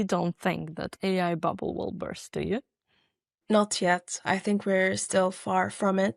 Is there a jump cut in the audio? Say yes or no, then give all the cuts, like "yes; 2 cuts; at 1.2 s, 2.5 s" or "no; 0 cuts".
no; 0 cuts